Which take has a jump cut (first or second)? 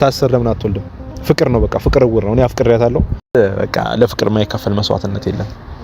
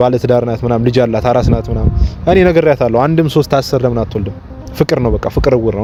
first